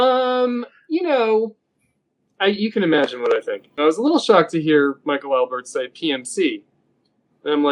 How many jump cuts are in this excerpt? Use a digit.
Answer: 1